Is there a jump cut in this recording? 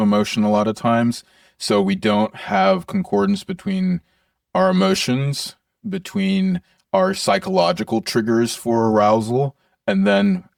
no; 0 cuts

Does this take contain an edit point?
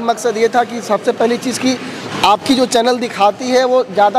no; 0 cuts

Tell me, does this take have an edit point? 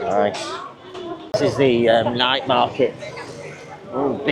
yes; 1 cut; at 1.2 s

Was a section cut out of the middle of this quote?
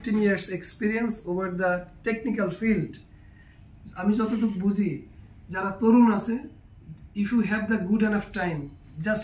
no; 0 cuts

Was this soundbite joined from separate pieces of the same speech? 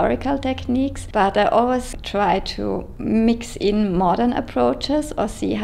yes; 2 cuts; at 1.0 s, 2.9 s

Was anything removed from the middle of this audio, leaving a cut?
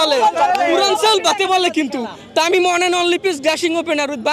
no; 0 cuts

